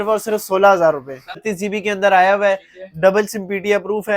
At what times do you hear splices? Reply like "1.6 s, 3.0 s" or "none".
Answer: 1.5 s